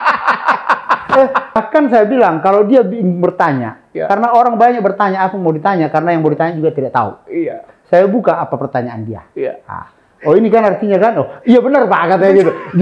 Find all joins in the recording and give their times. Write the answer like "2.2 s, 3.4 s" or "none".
1.6 s